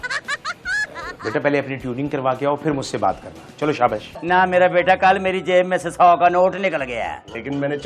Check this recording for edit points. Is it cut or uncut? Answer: cut